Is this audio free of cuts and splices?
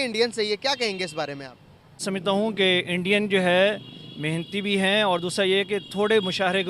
no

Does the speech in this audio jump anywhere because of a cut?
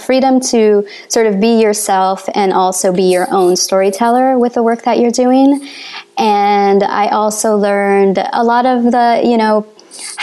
no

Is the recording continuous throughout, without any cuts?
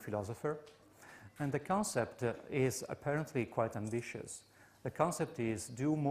no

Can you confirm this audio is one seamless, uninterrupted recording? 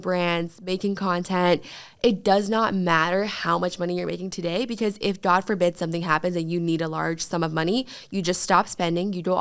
yes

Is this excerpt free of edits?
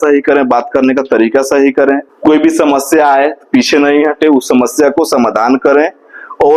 no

